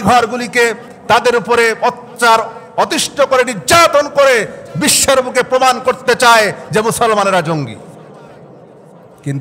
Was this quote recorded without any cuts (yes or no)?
yes